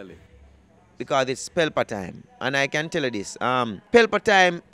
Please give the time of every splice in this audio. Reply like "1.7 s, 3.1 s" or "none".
3.8 s